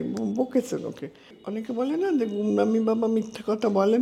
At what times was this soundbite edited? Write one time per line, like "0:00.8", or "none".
0:01.4